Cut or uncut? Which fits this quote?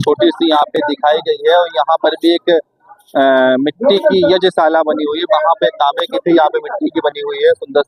uncut